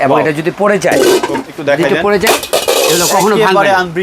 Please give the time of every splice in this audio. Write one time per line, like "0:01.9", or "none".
0:01.4